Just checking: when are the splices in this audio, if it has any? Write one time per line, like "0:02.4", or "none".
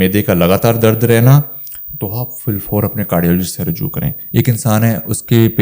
0:04.2